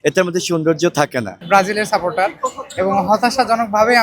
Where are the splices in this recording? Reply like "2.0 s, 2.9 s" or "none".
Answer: 1.3 s

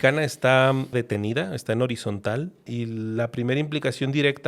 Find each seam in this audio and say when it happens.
0.9 s, 2.7 s

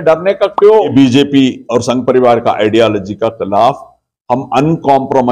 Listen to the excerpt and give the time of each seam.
0.9 s

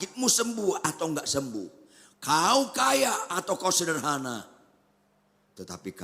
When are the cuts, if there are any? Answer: none

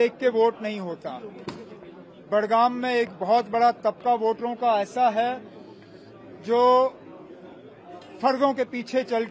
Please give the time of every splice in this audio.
none

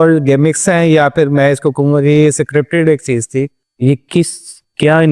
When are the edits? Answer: 3.5 s

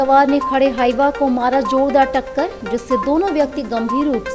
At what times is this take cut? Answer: none

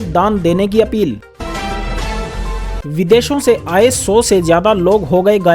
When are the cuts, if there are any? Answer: 1.2 s, 2.8 s

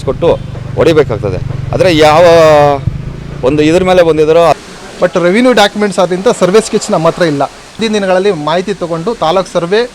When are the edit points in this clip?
4.6 s, 7.8 s

